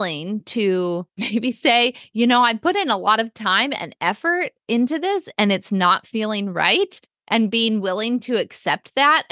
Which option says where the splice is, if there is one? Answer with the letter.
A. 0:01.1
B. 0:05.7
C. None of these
A